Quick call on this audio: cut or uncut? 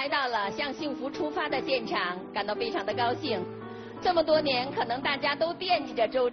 uncut